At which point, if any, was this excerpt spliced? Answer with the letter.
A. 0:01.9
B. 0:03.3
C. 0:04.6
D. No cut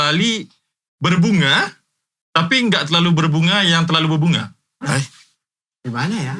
D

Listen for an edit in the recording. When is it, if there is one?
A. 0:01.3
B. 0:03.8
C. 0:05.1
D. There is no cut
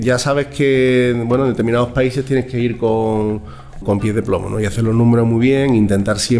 B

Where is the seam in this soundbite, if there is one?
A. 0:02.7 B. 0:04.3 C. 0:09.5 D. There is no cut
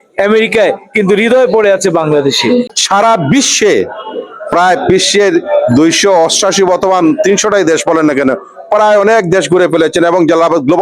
A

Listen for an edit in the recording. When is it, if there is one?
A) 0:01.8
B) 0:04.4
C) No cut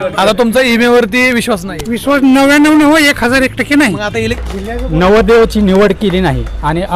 B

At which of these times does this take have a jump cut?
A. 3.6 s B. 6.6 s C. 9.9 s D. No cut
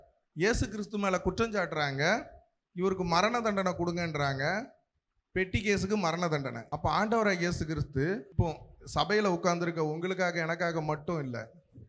B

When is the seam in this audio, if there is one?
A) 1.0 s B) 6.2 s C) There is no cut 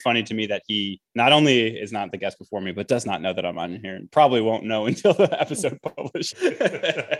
B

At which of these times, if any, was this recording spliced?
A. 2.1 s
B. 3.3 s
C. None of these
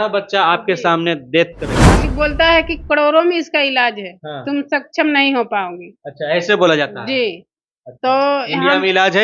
A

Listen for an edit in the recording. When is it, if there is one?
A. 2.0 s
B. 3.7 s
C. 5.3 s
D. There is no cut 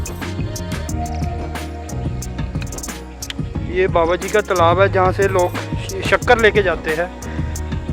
B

